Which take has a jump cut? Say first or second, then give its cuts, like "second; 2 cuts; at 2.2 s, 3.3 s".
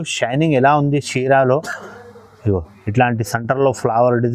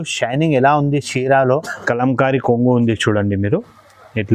second; 1 cut; at 1.8 s